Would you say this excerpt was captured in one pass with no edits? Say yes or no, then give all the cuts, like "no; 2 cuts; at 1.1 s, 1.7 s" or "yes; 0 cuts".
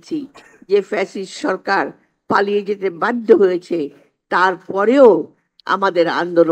yes; 0 cuts